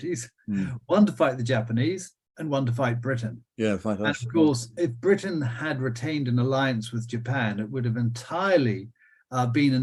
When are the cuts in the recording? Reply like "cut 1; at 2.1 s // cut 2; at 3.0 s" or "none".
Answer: none